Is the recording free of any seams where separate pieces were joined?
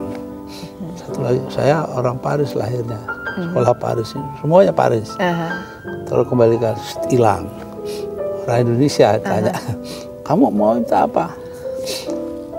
yes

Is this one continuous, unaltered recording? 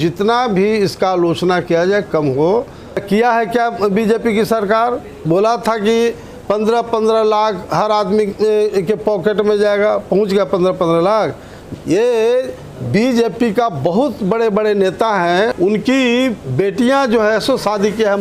no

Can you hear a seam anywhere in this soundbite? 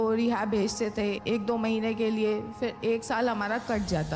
yes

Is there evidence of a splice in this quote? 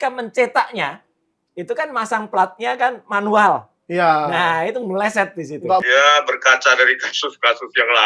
yes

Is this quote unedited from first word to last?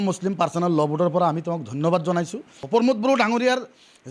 no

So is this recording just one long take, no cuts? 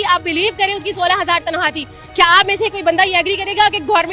yes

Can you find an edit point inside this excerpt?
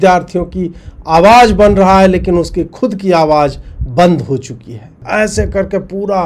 yes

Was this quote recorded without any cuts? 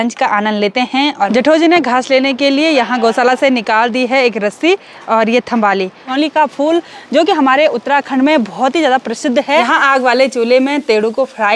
no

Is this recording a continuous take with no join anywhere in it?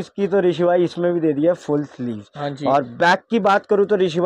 yes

